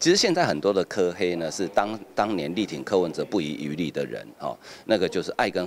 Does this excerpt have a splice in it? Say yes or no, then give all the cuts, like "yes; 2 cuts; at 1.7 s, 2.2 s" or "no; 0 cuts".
no; 0 cuts